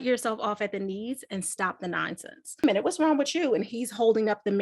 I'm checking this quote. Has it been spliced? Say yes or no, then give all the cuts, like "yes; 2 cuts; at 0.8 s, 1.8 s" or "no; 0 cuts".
yes; 1 cut; at 2.6 s